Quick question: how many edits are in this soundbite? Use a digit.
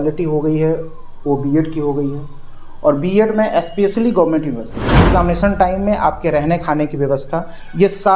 1